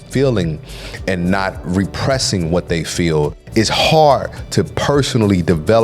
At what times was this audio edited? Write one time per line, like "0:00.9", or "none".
0:03.4